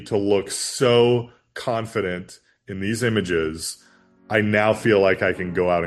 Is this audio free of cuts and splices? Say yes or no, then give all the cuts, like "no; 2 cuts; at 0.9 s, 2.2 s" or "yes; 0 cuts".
yes; 0 cuts